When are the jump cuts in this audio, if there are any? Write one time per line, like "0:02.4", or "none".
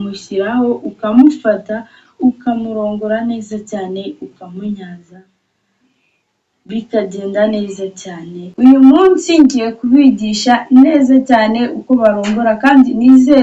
0:08.4